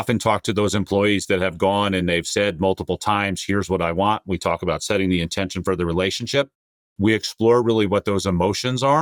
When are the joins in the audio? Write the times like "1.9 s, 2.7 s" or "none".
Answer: none